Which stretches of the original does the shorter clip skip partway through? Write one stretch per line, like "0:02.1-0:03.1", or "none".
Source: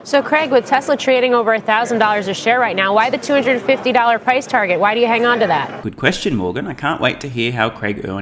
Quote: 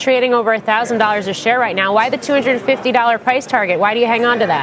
none